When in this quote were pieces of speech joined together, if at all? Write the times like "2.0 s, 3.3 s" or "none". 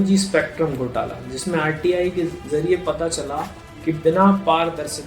2.4 s